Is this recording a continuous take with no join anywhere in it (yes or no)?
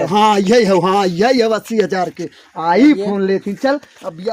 yes